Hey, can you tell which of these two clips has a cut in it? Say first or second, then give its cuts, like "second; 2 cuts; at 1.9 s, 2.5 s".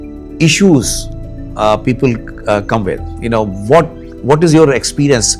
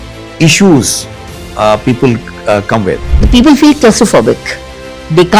second; 1 cut; at 3.1 s